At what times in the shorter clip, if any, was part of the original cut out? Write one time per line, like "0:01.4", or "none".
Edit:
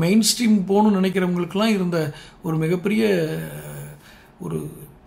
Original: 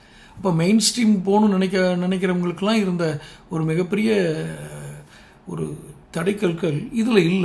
0:01.1